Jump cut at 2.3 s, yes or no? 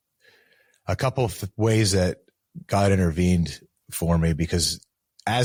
no